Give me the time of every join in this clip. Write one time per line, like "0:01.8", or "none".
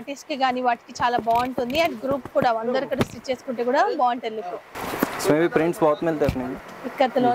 none

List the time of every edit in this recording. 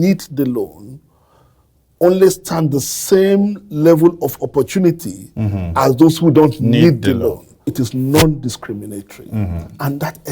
0:07.7

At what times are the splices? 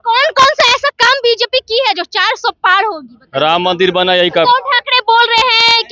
0:04.4

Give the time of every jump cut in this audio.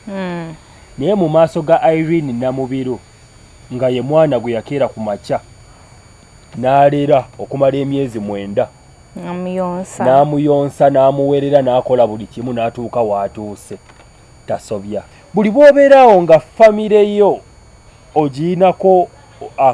0:15.1

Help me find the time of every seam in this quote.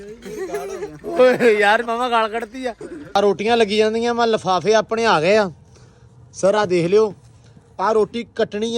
0:03.2

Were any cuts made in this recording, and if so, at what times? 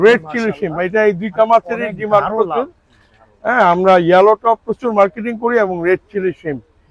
none

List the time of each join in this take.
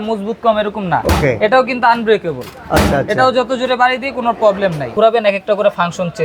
0:04.9

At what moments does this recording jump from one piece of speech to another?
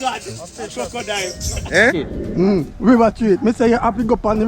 0:02.4

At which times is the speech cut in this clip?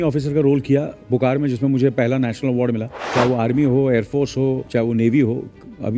0:03.0
0:04.7

